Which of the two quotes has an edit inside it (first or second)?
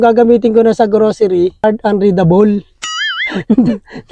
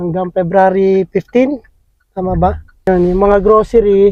first